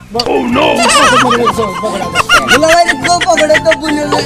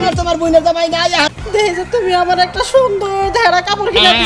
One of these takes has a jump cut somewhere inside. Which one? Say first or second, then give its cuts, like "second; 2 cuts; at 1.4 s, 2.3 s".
second; 1 cut; at 1.3 s